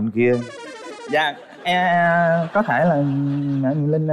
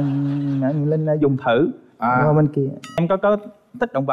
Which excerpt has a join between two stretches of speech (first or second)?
second